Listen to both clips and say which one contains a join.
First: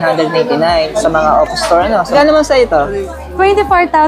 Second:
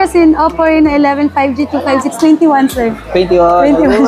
first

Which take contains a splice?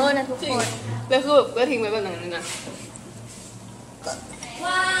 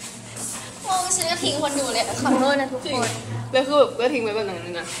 first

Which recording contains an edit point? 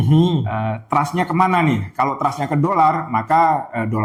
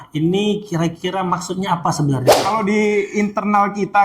second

